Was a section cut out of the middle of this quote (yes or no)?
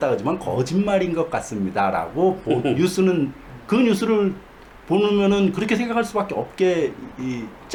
no